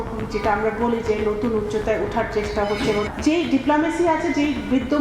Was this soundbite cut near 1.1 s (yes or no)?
no